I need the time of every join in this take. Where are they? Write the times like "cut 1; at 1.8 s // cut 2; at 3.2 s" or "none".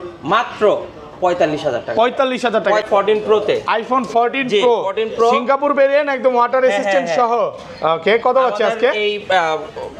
cut 1; at 2.8 s